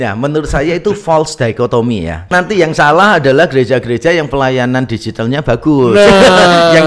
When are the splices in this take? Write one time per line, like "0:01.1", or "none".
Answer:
0:02.2